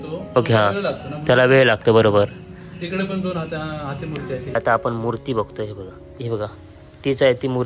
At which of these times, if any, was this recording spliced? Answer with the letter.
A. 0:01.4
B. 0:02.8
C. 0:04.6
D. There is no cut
C